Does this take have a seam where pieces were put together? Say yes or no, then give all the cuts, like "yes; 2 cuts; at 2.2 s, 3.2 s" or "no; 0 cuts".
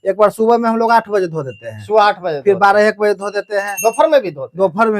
no; 0 cuts